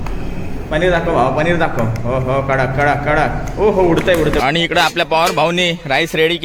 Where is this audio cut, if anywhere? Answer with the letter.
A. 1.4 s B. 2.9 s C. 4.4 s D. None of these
C